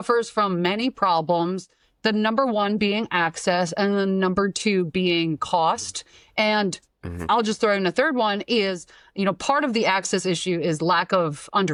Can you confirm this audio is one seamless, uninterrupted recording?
yes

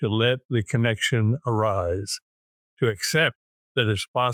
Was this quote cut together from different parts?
no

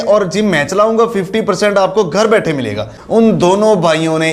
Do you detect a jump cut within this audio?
yes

